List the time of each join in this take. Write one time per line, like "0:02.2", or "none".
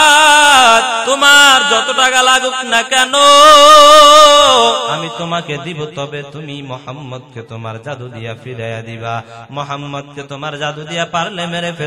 0:01.0
0:05.0

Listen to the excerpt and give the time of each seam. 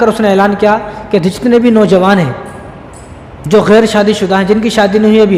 none

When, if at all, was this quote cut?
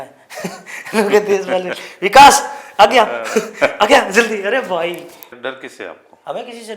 0:05.2

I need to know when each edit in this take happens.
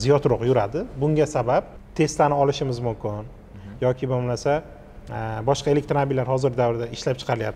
0:01.8

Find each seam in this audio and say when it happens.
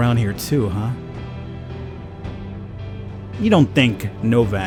none

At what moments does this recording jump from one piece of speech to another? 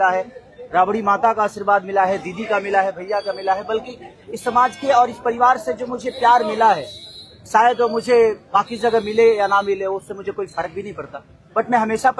none

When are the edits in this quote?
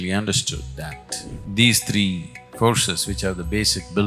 0:01.4

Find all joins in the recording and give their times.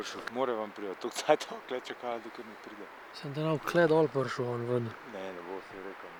none

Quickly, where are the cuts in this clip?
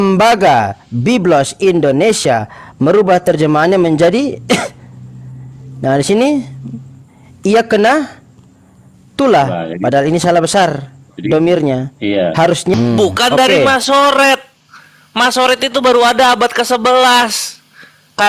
0:12.7

